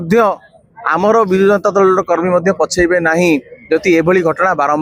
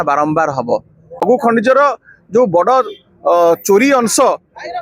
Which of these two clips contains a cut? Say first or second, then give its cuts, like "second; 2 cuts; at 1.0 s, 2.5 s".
second; 1 cut; at 1.2 s